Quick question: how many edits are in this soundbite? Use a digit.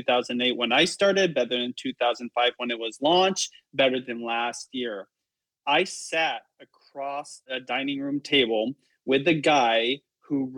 1